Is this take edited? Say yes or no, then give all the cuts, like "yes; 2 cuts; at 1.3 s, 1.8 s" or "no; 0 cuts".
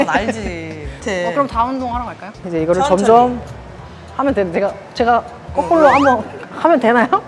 yes; 1 cut; at 2.3 s